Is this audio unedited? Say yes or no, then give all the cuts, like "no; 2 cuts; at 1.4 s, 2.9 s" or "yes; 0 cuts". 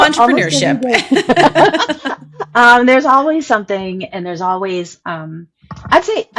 yes; 0 cuts